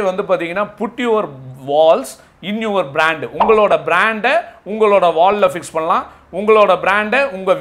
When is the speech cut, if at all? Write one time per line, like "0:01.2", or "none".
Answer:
none